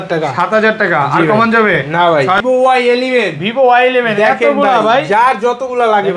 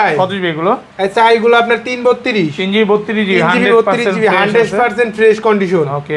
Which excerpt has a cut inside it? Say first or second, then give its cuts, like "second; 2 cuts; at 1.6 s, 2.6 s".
first; 1 cut; at 2.4 s